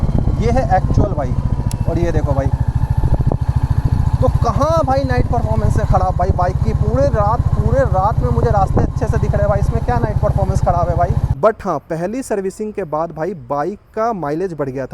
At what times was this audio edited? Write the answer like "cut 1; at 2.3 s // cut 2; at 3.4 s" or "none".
cut 1; at 11.3 s